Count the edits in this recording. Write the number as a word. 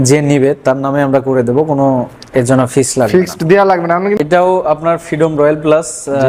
one